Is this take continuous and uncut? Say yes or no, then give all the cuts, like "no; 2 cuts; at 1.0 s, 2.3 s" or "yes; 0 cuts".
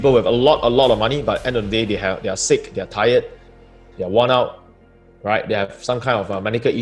yes; 0 cuts